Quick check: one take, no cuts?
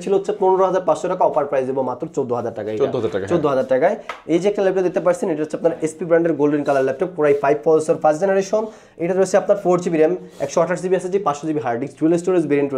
yes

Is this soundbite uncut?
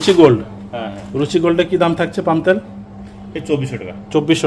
yes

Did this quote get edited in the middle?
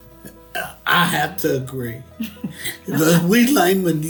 no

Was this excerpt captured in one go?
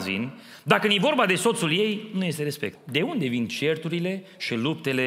no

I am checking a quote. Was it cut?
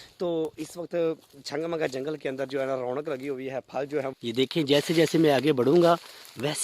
yes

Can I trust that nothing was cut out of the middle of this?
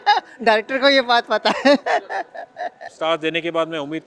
no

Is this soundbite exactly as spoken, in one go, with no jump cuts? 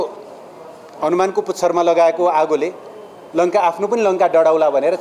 yes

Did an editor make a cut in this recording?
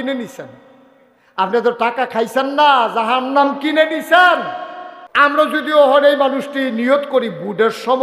yes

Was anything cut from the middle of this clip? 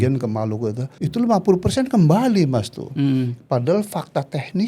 yes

